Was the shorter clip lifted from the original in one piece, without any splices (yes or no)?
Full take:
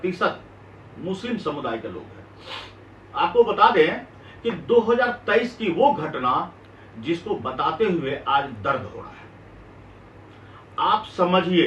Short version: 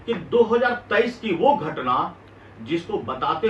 yes